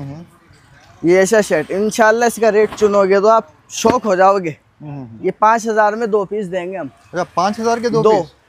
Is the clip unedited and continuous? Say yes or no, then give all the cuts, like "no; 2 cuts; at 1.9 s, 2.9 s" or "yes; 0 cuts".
yes; 0 cuts